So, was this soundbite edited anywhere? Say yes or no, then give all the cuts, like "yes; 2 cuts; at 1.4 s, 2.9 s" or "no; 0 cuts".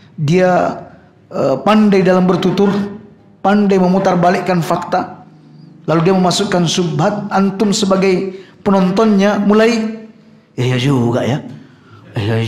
yes; 1 cut; at 4.8 s